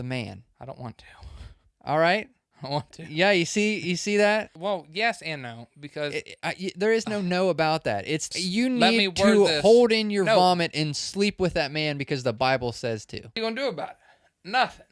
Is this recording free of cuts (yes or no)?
no